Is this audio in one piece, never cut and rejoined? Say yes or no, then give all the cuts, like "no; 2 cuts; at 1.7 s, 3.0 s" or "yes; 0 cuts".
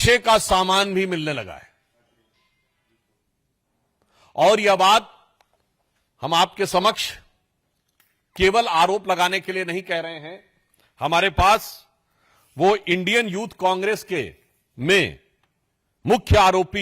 yes; 0 cuts